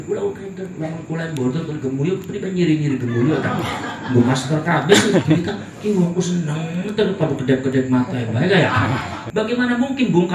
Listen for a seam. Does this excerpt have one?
yes; 1 cut; at 9.2 s

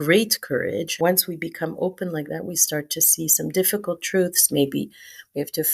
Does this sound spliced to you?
yes; 1 cut; at 1.0 s

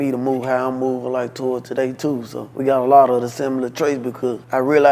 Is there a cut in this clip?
yes; 1 cut; at 2.5 s

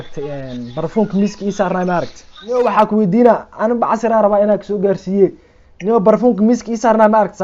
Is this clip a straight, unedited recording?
no; 1 cut; at 2.6 s

